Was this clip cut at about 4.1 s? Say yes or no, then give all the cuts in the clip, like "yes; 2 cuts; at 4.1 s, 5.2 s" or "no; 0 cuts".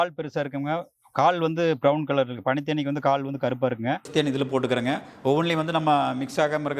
yes; 1 cut; at 4.1 s